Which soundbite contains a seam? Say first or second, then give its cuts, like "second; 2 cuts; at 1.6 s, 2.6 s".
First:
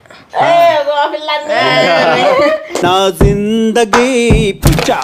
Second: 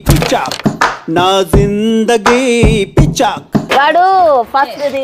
second; 1 cut; at 3.7 s